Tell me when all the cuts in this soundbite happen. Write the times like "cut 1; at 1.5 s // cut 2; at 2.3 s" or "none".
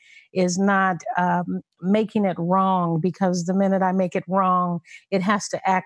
none